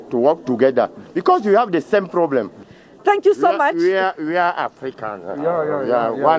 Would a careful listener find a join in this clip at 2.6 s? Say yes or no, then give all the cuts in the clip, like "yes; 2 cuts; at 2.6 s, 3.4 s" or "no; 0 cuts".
yes; 1 cut; at 2.6 s